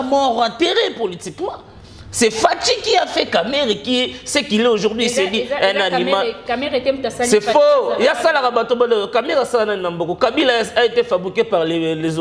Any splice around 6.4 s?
no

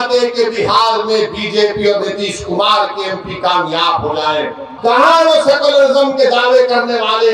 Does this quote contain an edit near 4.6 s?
yes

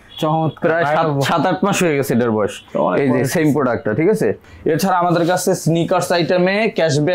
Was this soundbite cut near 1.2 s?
no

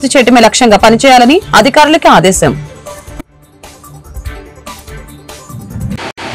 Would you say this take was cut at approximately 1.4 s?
no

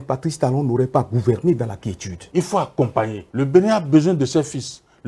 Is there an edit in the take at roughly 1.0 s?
no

